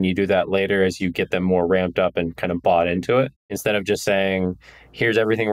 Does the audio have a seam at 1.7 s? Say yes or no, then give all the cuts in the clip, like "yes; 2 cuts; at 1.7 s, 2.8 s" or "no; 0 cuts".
no; 1 cut; at 3.5 s